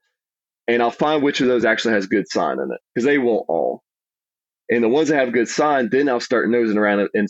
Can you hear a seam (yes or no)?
no